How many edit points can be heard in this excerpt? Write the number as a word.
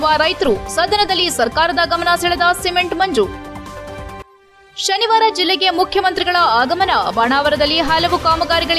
zero